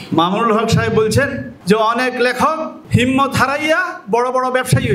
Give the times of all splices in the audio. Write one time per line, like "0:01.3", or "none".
0:01.5
0:02.7